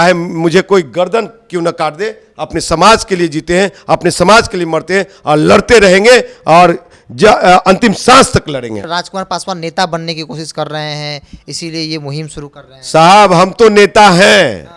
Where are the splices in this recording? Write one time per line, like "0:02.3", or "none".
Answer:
0:08.9